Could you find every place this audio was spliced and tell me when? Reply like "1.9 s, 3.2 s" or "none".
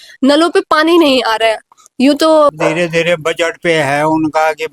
2.5 s